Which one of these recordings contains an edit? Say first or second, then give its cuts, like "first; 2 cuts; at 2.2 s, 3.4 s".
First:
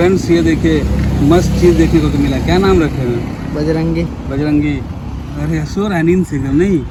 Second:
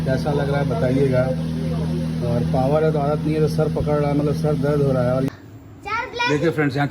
second; 1 cut; at 5.3 s